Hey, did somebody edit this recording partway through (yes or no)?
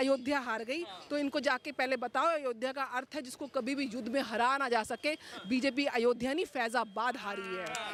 no